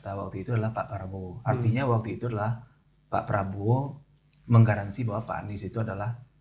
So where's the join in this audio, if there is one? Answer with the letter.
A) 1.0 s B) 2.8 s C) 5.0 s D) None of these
D